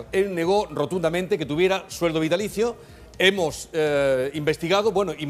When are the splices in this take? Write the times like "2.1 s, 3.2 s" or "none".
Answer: 3.8 s